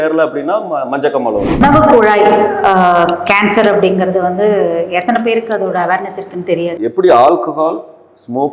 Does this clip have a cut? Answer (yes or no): yes